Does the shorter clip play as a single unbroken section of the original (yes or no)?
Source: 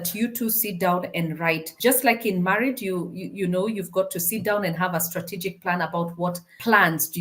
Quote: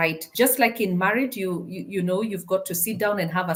yes